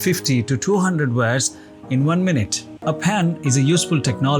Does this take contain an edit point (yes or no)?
no